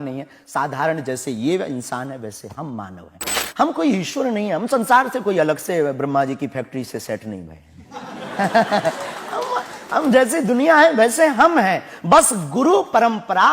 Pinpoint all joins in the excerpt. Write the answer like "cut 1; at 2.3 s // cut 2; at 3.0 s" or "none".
cut 1; at 3.4 s